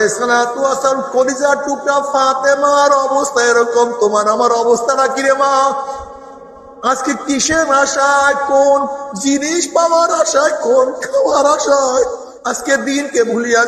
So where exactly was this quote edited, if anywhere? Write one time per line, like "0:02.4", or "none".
0:12.3